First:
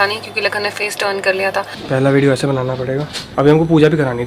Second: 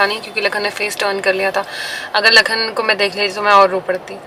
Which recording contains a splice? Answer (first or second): first